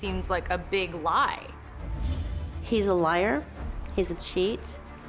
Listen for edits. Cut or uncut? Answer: cut